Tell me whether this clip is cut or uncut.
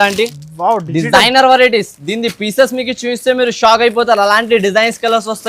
uncut